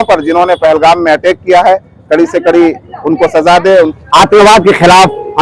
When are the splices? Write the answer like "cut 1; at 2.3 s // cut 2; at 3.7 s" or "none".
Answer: cut 1; at 3.9 s